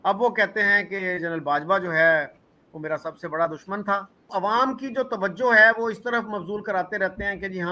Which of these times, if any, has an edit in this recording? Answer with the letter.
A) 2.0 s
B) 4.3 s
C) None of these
B